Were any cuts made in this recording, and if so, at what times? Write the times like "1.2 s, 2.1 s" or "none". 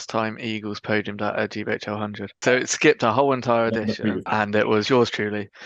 2.4 s, 4.3 s

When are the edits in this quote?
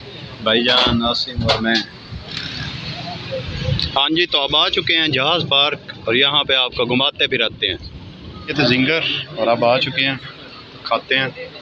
2.3 s, 8.4 s

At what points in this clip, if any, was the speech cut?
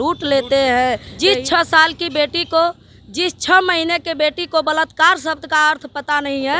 1.1 s

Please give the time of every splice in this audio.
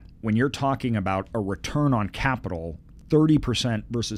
none

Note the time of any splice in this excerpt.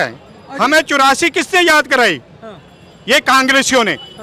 none

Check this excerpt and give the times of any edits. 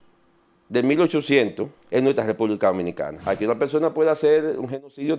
1.7 s, 3.1 s

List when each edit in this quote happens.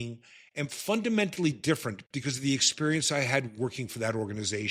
none

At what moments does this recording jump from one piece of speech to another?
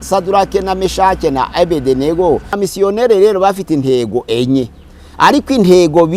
2.6 s

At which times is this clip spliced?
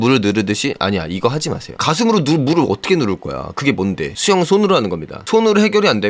1.7 s, 4.1 s

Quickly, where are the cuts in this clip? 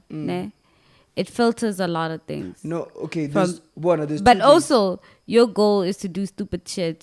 none

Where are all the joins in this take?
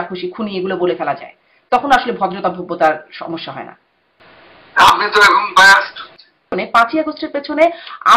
6.5 s

